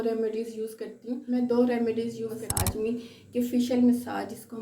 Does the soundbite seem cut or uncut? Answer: cut